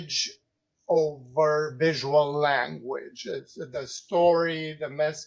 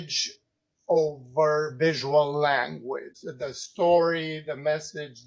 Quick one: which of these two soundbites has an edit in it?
second; 1 cut; at 3.2 s

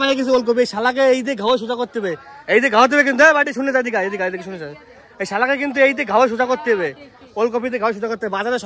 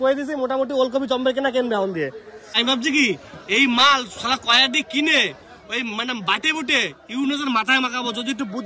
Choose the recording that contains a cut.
second; 1 cut; at 2.5 s

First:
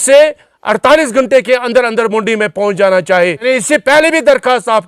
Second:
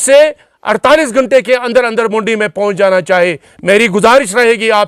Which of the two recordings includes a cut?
first; 1 cut; at 3.4 s

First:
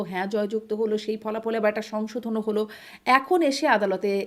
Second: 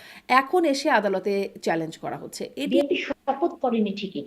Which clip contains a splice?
second; 1 cut; at 2.7 s

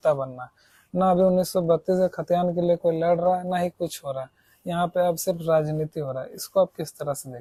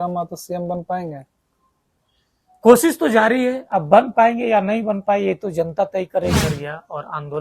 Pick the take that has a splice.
second; 1 cut; at 6.4 s

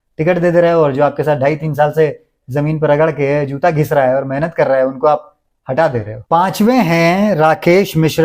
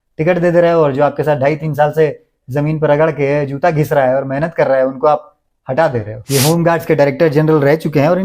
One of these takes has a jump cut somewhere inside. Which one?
second; 1 cut; at 6.2 s

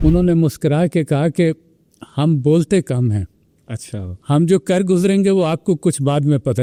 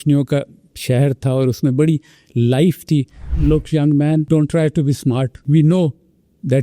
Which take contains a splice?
second; 3 cuts; at 3.2 s, 4.3 s, 5.4 s

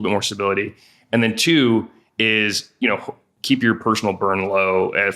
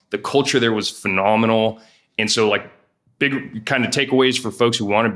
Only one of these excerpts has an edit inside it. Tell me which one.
first; 1 cut; at 3.4 s

